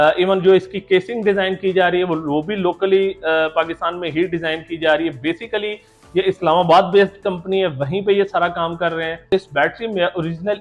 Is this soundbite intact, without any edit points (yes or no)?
no